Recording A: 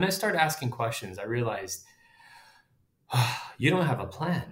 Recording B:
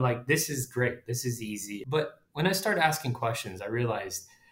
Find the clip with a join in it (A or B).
B